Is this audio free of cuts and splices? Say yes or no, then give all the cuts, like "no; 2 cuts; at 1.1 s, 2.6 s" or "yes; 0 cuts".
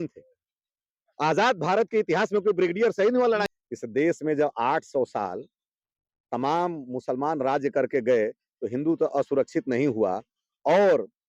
no; 1 cut; at 3.5 s